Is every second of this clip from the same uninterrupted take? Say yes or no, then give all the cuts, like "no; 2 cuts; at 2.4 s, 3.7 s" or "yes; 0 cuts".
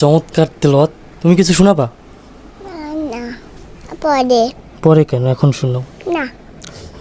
no; 1 cut; at 1.1 s